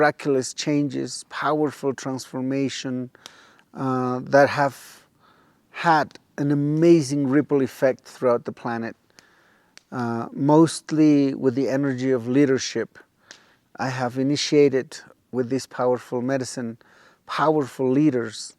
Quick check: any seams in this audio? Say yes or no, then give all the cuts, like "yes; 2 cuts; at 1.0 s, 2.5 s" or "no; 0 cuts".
no; 0 cuts